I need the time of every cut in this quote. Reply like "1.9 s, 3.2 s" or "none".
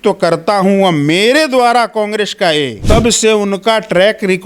2.8 s